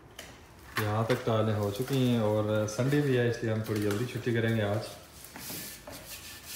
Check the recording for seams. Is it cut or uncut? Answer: uncut